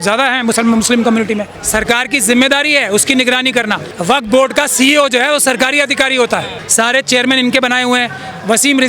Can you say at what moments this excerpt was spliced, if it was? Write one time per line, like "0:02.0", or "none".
0:01.5
0:03.9
0:06.6